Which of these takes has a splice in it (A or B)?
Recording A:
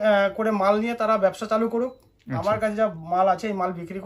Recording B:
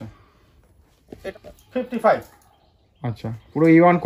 B